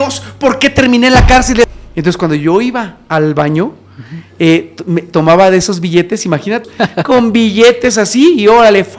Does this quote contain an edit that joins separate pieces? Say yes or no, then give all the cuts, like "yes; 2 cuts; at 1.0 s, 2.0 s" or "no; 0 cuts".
yes; 2 cuts; at 1.8 s, 6.7 s